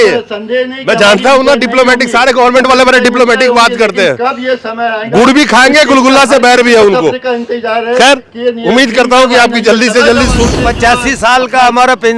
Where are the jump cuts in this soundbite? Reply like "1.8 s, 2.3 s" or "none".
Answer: 10.5 s